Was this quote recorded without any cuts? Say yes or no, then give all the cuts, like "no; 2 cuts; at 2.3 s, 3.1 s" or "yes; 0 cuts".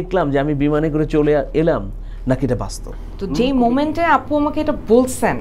no; 1 cut; at 3.2 s